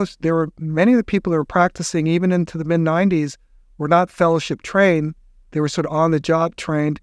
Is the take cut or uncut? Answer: uncut